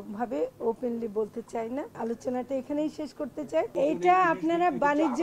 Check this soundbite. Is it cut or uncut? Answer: cut